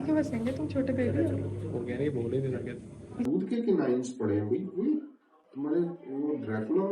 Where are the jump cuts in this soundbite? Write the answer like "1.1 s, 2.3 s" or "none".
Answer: 3.3 s